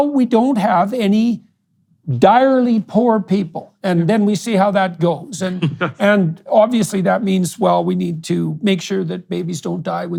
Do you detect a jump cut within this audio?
no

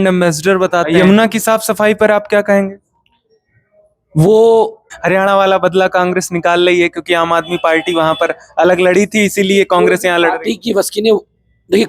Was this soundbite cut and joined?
yes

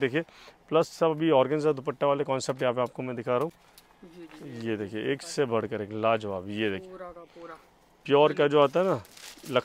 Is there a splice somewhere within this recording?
no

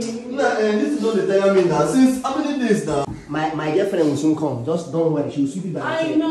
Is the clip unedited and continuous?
no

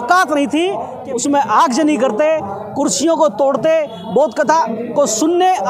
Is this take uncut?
no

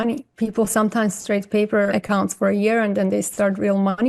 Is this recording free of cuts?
no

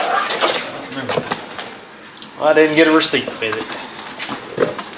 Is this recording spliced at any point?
no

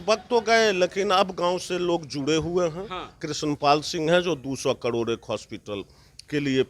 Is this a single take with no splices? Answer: no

